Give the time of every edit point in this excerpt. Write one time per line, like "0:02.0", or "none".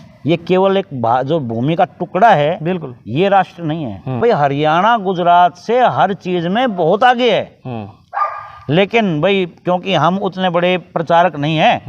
0:04.0